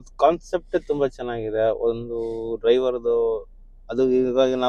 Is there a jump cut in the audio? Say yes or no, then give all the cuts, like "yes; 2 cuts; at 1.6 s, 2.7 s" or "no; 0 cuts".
no; 0 cuts